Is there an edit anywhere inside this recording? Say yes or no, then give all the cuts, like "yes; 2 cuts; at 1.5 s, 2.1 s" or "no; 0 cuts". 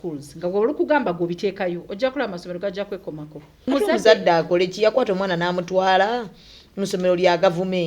yes; 1 cut; at 3.7 s